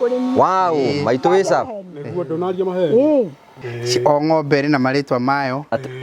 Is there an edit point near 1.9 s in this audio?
no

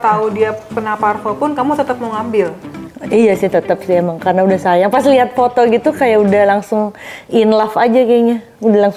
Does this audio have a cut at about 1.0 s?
no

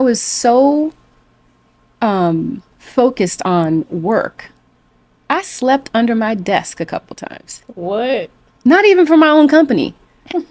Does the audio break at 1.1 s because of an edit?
no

